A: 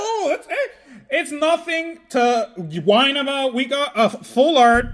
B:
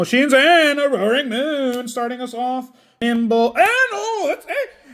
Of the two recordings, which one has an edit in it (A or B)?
B